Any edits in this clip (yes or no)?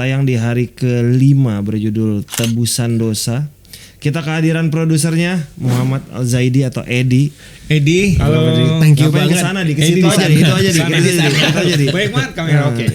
no